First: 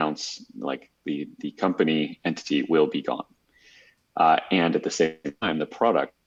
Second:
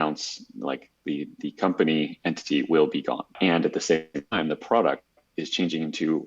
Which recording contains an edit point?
second; 1 cut; at 3.3 s

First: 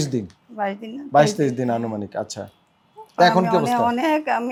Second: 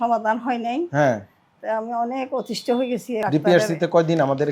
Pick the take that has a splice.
second; 1 cut; at 3.2 s

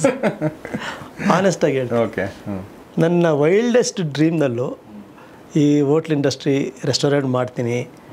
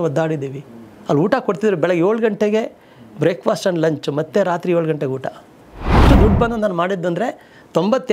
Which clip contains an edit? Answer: second; 1 cut; at 6.0 s

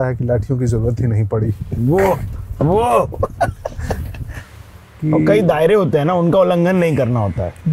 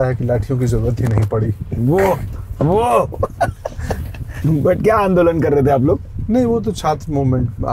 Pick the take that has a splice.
first; 1 cut; at 4.3 s

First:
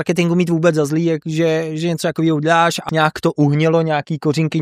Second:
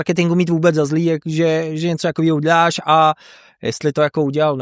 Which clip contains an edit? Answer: first; 1 cut; at 2.8 s

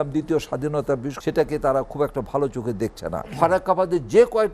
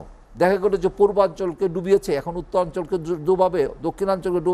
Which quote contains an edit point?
first; 2 cuts; at 1.1 s, 3.3 s

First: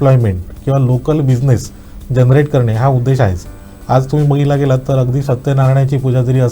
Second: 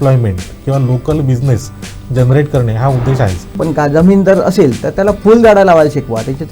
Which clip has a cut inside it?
second; 1 cut; at 3.5 s

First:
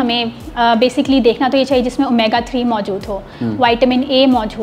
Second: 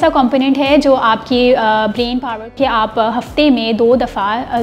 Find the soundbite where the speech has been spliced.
second; 1 cut; at 2.5 s

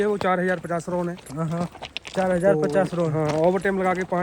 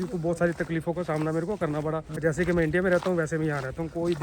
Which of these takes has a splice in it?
second; 1 cut; at 2.2 s

